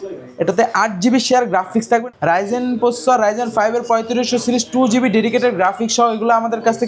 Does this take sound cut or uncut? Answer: cut